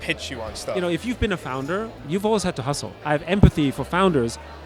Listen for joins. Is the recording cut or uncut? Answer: cut